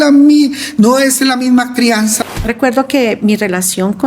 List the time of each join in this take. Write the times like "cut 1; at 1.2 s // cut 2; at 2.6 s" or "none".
cut 1; at 2.2 s